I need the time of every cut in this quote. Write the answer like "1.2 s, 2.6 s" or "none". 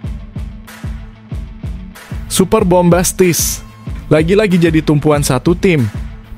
2.1 s